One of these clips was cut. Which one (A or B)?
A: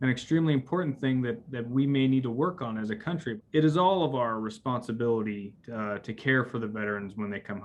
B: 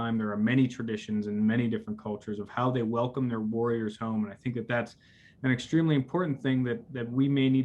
A